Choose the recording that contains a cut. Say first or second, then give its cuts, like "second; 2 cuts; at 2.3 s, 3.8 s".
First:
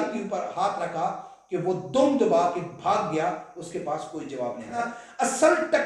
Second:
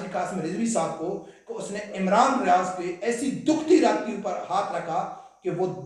first; 1 cut; at 4.8 s